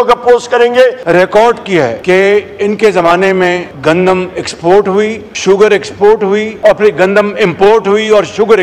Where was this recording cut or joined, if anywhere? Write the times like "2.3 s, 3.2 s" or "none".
1.0 s, 2.0 s, 3.7 s, 5.3 s, 6.5 s